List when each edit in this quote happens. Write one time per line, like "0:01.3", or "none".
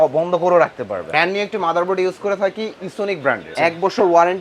0:01.0
0:03.5

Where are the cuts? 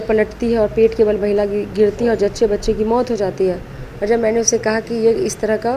none

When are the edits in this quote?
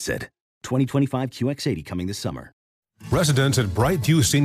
0:02.7

